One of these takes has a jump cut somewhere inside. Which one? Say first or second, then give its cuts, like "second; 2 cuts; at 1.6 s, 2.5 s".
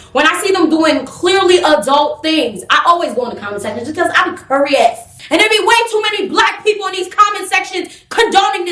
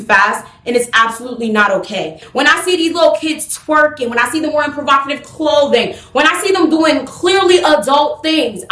second; 1 cut; at 2.2 s